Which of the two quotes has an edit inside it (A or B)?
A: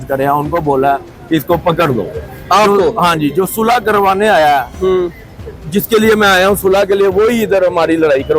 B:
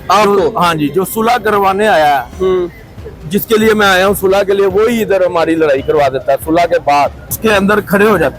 B